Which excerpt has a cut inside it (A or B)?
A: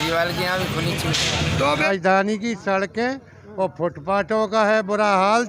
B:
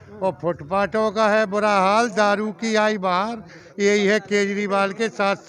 A